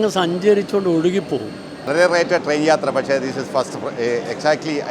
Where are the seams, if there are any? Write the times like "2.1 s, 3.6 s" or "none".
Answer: 1.9 s